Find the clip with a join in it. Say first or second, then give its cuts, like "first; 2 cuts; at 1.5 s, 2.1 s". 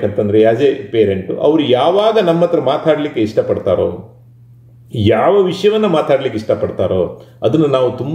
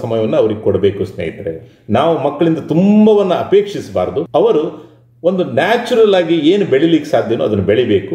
second; 2 cuts; at 1.7 s, 4.3 s